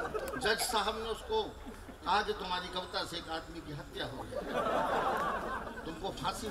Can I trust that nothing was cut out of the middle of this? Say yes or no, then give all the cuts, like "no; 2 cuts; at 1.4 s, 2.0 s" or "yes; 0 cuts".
yes; 0 cuts